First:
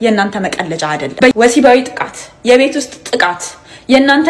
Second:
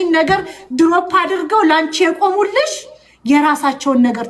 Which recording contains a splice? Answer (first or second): first